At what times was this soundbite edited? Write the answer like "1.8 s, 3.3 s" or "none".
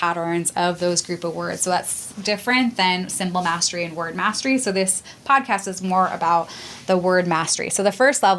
none